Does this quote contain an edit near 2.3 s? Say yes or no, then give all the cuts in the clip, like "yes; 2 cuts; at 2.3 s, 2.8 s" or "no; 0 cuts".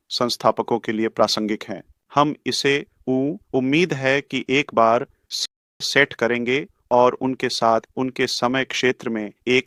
no; 0 cuts